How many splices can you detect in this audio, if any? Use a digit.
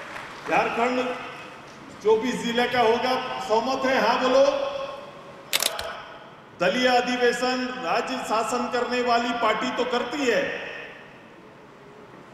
1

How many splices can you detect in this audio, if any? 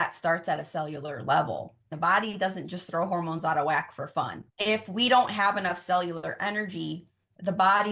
1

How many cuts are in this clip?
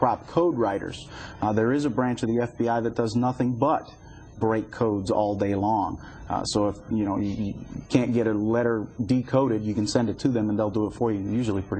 1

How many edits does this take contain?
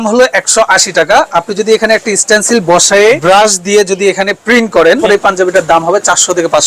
2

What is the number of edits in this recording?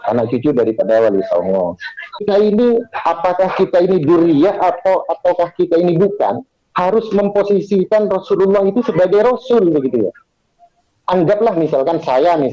1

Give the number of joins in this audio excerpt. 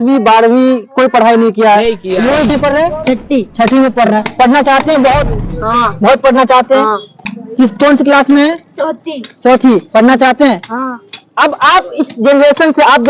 2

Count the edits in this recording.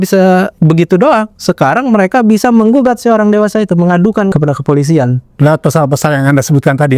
1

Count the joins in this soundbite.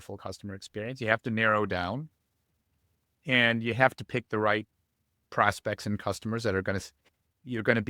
0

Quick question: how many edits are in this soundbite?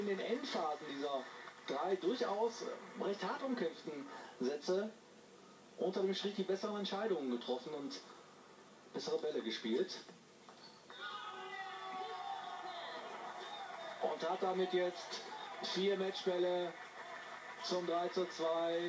1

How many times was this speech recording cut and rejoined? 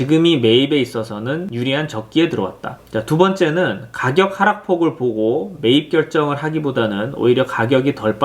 1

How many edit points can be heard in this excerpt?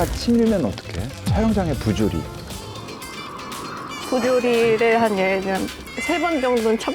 1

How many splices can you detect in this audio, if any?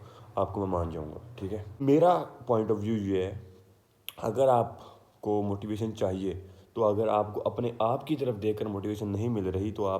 1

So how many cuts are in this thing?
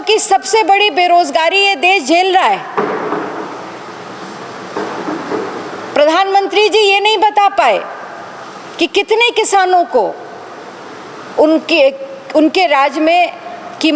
0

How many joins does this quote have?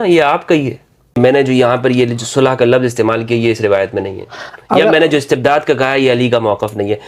1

